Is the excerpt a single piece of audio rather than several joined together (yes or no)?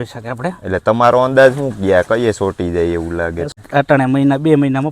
no